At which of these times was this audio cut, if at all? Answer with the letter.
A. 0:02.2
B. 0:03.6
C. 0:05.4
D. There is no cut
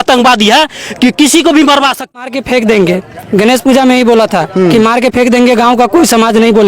A